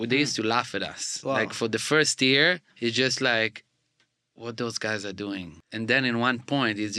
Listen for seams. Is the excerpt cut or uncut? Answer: cut